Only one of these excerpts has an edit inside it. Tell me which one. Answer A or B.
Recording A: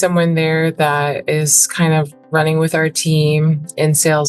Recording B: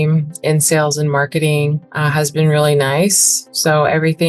B